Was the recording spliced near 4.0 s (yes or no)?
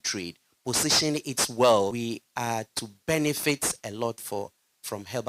no